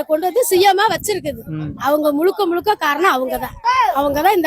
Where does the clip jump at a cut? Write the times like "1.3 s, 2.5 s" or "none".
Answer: none

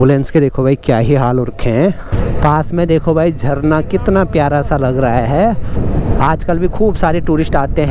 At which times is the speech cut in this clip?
none

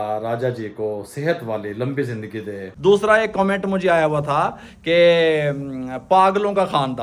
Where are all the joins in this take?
2.6 s

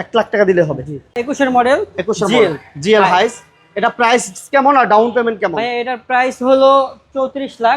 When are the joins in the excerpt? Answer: 1.1 s

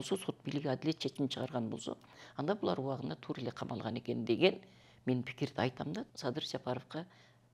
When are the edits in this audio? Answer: 6.0 s

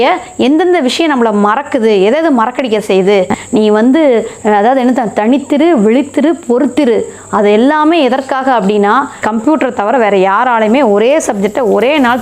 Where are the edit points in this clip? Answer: 3.4 s, 9.2 s

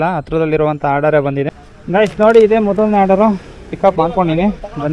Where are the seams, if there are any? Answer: 1.7 s

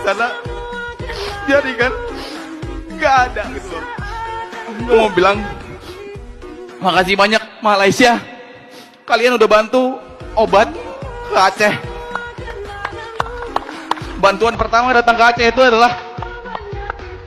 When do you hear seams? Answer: none

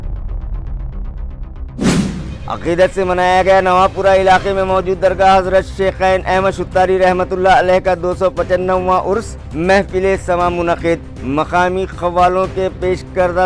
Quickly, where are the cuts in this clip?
1.9 s

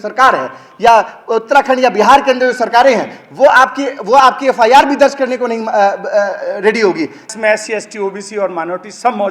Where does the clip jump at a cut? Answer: 7.3 s

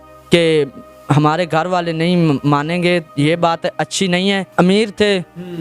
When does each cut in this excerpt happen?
4.5 s

